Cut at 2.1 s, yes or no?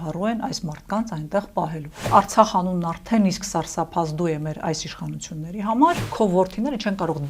yes